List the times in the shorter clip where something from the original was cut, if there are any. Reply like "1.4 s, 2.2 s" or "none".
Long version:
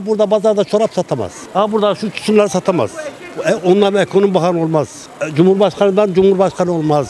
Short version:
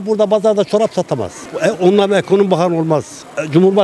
1.4 s